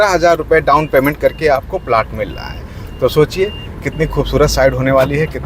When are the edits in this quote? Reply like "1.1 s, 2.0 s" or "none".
none